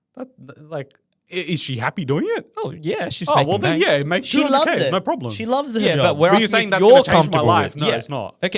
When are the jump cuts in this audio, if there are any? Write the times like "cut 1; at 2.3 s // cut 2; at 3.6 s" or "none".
none

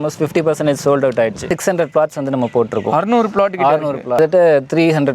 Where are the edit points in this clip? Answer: cut 1; at 1.5 s // cut 2; at 4.2 s

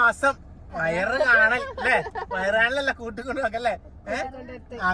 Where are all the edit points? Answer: none

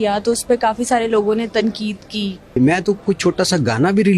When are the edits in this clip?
cut 1; at 2.6 s

